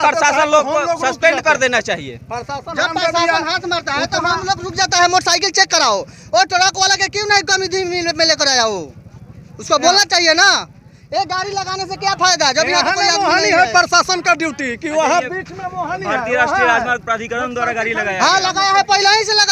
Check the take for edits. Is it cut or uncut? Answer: uncut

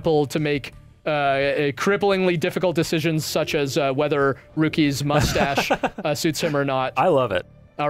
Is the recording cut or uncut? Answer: cut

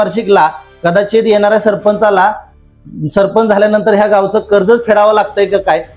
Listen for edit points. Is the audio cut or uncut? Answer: uncut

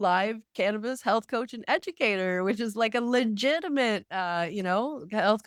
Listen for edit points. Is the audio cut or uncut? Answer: uncut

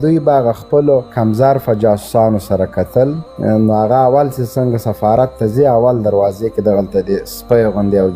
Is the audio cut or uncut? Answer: cut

